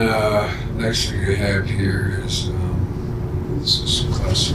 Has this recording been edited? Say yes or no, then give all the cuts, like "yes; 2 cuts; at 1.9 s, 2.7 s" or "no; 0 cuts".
yes; 1 cut; at 3.5 s